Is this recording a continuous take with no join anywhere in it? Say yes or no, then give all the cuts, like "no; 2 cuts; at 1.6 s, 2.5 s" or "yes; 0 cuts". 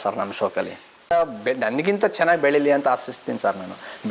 no; 1 cut; at 1.1 s